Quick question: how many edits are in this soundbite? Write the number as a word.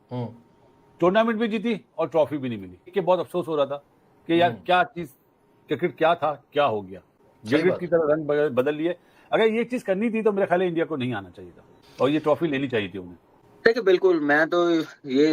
zero